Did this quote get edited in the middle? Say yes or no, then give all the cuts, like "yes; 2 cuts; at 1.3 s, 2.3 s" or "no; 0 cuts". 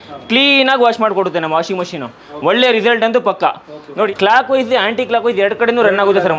yes; 1 cut; at 4.1 s